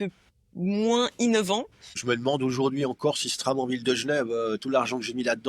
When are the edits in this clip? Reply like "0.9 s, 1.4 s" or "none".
2.0 s